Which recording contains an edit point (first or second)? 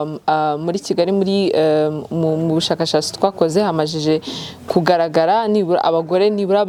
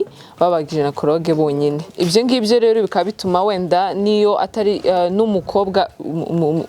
second